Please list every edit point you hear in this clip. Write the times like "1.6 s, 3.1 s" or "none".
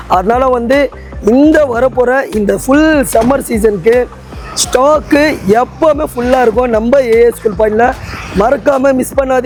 none